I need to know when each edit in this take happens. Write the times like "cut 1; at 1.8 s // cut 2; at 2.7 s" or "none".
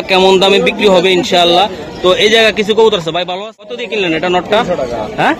cut 1; at 3.3 s